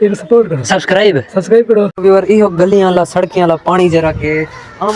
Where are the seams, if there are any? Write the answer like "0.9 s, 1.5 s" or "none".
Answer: 1.9 s